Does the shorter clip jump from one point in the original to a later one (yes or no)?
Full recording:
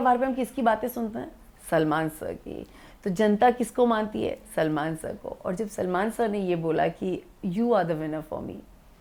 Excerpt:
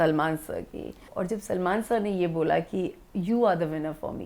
yes